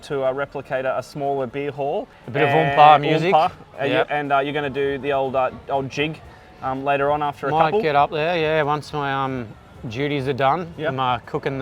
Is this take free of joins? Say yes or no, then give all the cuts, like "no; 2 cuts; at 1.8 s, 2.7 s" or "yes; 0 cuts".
no; 1 cut; at 2.2 s